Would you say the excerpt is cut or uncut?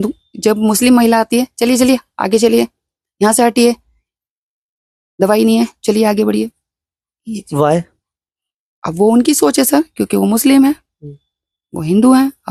uncut